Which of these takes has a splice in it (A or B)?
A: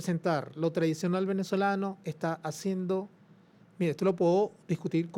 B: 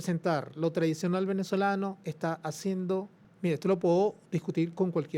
B